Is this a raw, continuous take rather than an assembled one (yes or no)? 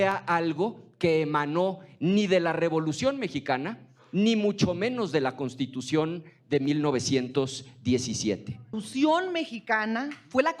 no